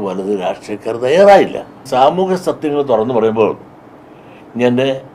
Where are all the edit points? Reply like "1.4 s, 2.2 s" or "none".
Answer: 1.8 s